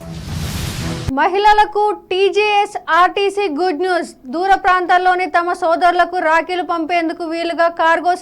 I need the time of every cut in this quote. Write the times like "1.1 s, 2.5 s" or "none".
1.1 s